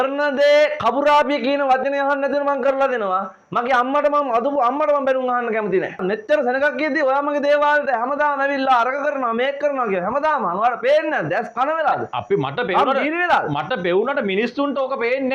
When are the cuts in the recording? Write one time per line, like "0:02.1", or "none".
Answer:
0:05.9